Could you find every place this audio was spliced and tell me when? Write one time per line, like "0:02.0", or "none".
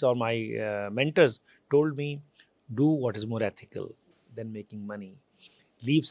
none